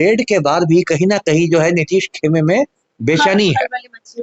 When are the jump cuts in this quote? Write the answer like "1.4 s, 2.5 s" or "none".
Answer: none